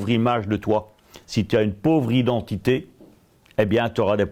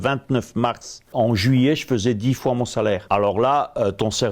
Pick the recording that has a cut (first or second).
second